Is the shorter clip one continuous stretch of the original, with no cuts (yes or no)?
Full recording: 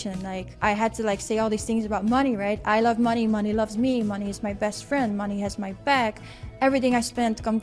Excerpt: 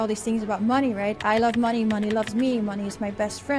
yes